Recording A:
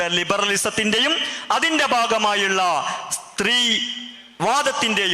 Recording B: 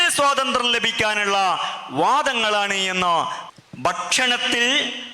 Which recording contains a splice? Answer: B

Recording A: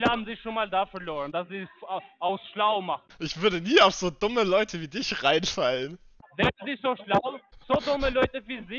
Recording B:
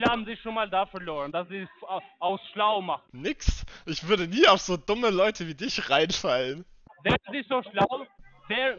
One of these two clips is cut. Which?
A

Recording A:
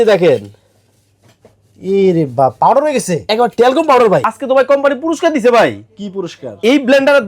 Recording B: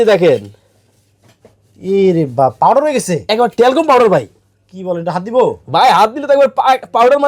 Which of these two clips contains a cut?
A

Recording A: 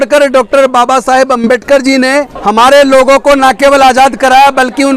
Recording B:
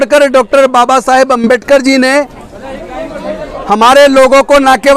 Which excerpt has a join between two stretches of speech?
A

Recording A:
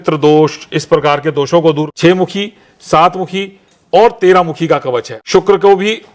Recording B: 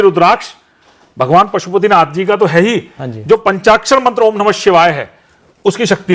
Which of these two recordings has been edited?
A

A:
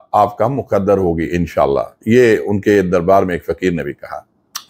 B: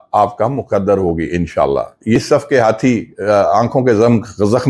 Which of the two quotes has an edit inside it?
B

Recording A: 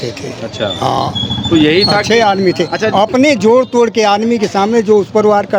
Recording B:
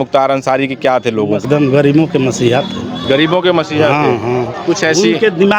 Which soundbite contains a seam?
B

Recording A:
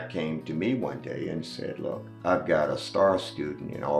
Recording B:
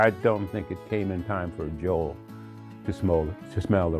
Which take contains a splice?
A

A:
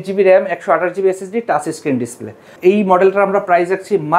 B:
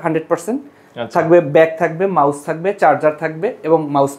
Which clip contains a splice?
A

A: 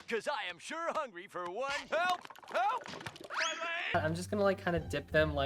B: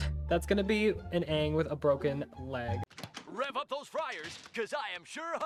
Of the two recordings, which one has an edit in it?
A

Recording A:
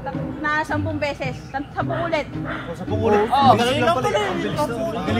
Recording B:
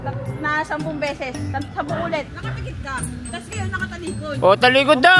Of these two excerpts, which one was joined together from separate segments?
B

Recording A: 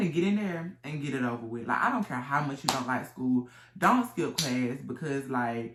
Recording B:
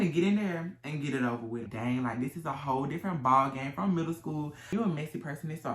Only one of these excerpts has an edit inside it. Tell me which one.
B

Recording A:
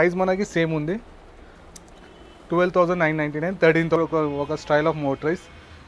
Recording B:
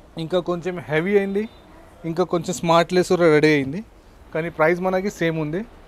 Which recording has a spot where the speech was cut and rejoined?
A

